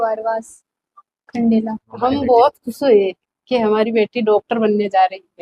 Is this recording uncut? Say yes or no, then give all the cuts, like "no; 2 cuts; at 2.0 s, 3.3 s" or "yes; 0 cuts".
no; 1 cut; at 1.9 s